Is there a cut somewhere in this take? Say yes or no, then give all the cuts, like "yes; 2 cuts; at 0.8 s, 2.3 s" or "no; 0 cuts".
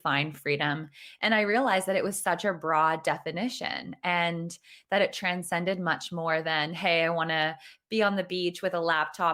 no; 0 cuts